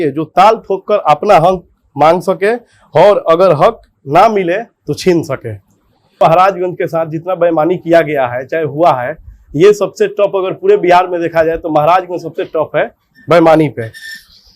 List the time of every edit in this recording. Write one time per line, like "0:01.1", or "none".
0:06.2

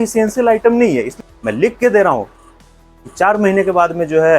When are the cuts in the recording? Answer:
0:01.1

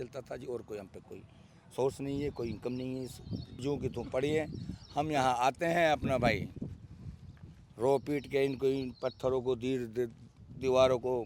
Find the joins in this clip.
0:03.6

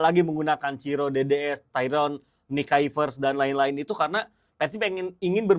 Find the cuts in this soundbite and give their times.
none

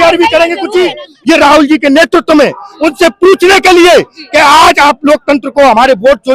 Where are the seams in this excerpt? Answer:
0:01.1

